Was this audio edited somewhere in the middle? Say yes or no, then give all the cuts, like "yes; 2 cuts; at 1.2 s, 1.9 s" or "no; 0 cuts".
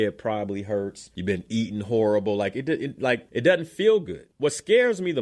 yes; 3 cuts; at 1.1 s, 3.3 s, 4.2 s